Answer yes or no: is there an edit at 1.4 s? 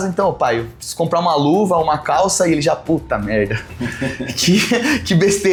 no